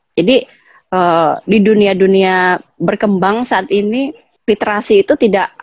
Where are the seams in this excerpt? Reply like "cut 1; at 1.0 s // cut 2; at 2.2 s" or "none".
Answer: cut 1; at 4.2 s